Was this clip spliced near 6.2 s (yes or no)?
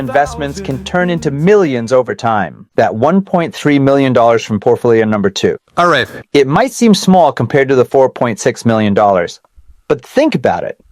no